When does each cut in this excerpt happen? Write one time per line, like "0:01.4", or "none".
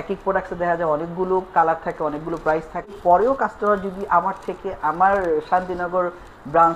0:03.0